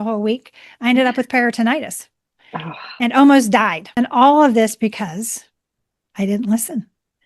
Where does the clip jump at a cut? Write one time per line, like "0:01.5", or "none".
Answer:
0:03.8